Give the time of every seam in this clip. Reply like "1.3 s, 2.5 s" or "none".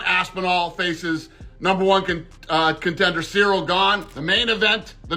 4.1 s

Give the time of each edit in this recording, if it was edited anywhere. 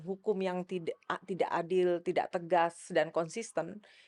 none

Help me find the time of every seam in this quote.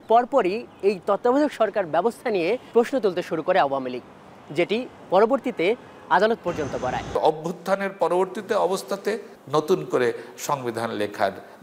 2.6 s, 7.1 s, 9.3 s

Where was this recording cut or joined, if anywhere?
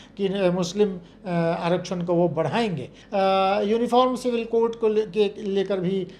3.0 s

